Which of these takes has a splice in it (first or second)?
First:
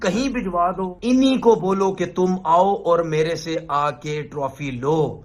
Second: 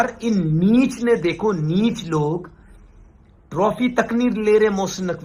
first